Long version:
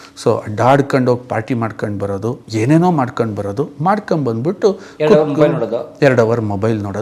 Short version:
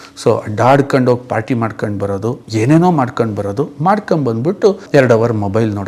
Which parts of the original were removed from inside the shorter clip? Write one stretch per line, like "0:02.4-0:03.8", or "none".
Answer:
0:04.8-0:05.9